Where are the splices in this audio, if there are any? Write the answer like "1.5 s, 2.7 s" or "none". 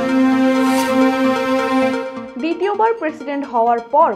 2.1 s